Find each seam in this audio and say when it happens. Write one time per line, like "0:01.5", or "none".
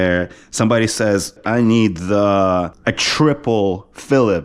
0:01.4
0:02.7